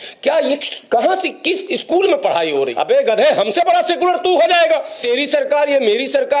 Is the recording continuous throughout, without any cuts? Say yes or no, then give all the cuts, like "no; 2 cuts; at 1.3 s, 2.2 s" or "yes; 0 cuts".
no; 2 cuts; at 2.7 s, 5.0 s